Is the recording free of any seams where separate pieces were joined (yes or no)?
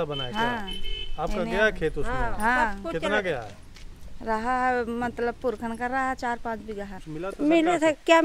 no